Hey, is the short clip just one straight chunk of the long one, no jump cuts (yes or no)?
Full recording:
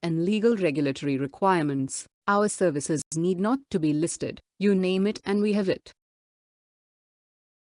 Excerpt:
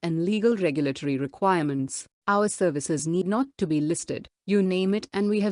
no